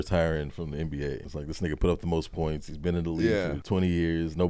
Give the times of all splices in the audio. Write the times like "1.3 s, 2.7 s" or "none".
1.3 s, 3.6 s

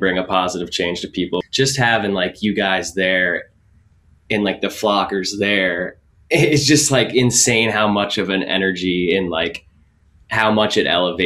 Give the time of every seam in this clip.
1.4 s

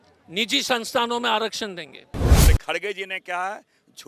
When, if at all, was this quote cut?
2.5 s

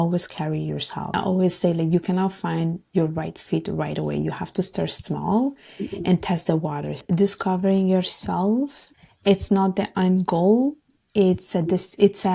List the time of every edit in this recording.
1.2 s, 7.0 s, 8.9 s

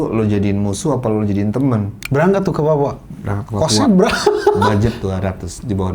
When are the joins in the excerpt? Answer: 2.0 s

